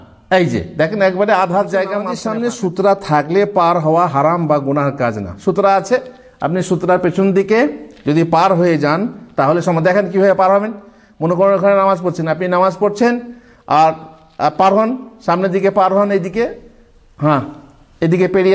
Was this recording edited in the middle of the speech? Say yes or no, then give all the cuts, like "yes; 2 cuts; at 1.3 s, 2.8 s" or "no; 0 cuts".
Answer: yes; 1 cut; at 2.1 s